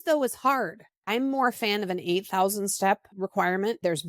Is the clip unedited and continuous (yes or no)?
no